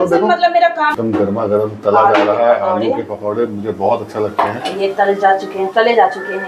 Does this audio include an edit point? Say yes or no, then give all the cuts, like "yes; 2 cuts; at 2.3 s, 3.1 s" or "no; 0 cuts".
yes; 1 cut; at 1.0 s